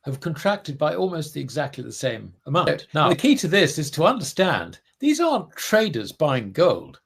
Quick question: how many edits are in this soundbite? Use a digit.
1